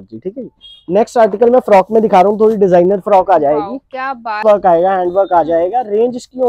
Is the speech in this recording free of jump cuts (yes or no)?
no